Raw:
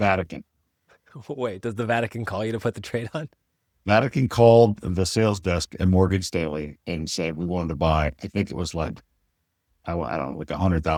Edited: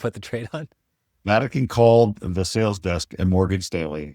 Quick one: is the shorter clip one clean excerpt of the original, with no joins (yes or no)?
yes